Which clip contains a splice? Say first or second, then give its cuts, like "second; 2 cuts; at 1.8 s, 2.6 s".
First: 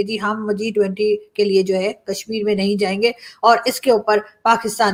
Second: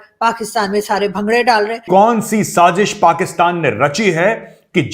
second; 1 cut; at 1.8 s